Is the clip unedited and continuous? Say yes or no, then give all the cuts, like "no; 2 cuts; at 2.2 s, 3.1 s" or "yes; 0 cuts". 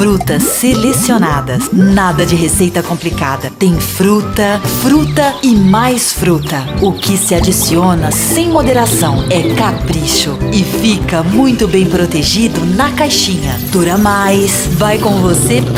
yes; 0 cuts